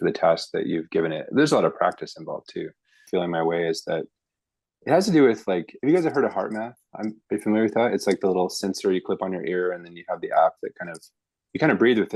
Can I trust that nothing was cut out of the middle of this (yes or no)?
no